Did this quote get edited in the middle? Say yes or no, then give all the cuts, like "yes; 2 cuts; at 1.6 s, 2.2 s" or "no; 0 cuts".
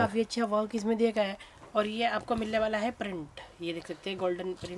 no; 0 cuts